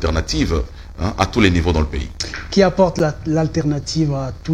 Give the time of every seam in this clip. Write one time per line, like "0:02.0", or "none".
none